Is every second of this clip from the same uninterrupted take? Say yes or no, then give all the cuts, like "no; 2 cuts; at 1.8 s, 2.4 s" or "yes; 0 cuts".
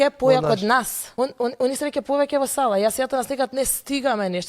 no; 1 cut; at 1.0 s